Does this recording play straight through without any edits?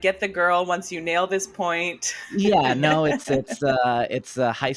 yes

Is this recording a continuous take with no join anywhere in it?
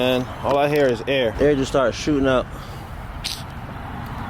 no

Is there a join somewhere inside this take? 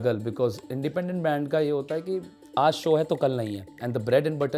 yes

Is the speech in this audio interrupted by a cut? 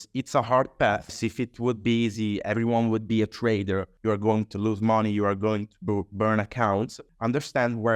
yes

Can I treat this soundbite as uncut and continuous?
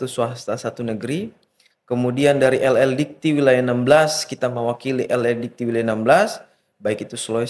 yes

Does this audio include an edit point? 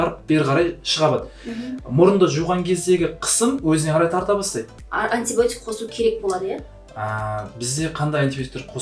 yes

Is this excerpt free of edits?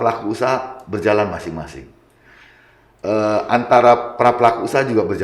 yes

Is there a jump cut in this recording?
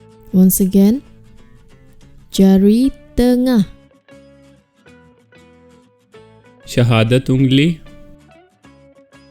yes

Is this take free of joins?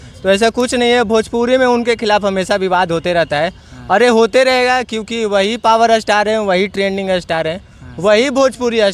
yes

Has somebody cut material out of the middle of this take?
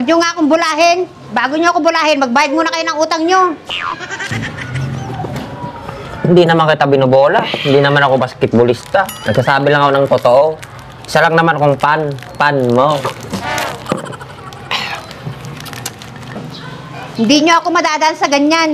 no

